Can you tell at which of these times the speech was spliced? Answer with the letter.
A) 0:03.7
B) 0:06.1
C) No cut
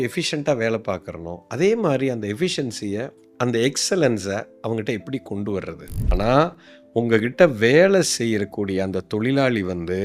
B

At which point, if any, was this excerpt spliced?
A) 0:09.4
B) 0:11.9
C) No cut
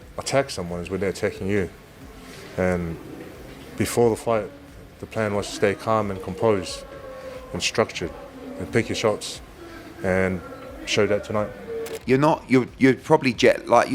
B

